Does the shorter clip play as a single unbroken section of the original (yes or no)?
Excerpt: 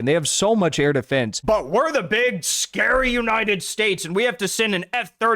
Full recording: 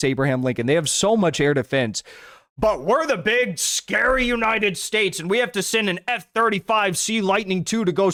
no